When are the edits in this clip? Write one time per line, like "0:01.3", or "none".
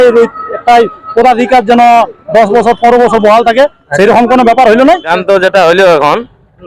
0:05.1